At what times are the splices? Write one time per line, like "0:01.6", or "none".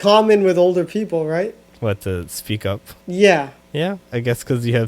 0:01.7
0:02.9
0:03.6